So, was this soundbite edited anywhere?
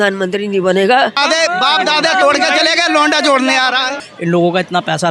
yes; 2 cuts; at 1.2 s, 3.9 s

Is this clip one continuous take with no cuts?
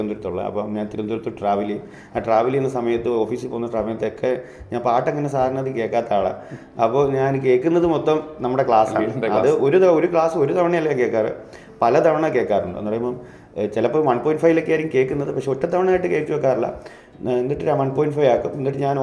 yes; 0 cuts

